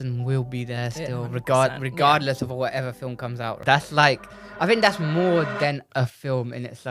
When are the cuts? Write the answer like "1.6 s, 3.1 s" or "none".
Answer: 3.6 s